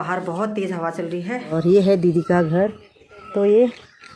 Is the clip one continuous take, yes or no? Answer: no